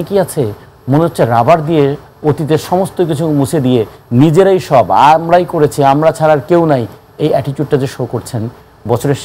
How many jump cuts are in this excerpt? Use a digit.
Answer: 0